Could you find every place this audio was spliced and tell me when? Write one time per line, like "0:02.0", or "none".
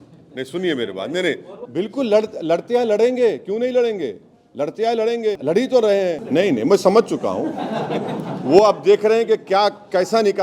0:01.5
0:05.4
0:06.2